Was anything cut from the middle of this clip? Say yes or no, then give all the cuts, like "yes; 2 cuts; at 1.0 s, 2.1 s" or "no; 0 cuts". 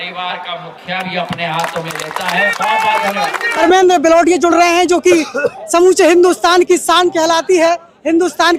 no; 0 cuts